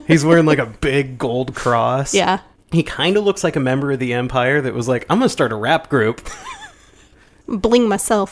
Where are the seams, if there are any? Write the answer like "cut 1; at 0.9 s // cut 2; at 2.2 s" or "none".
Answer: cut 1; at 7.4 s